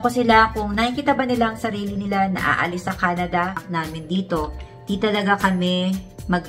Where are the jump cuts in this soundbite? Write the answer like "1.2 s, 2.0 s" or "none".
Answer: 3.7 s